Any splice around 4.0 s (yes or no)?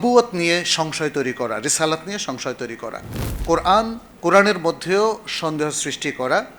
yes